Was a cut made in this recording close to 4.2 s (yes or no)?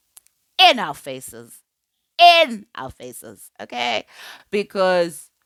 no